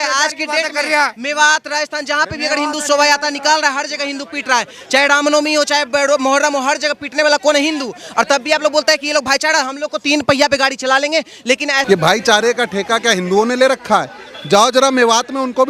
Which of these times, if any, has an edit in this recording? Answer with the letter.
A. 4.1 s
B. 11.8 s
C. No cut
B